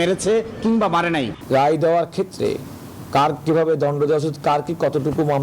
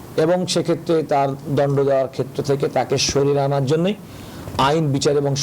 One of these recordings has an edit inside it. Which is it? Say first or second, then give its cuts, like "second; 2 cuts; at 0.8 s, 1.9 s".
first; 1 cut; at 1.4 s